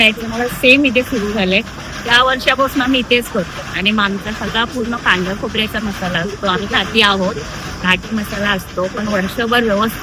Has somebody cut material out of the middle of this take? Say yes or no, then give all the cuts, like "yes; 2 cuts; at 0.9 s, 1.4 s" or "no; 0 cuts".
no; 0 cuts